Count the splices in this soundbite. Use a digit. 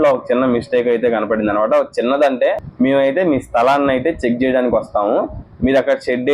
1